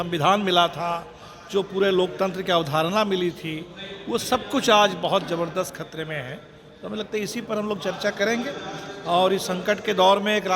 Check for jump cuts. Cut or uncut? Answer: uncut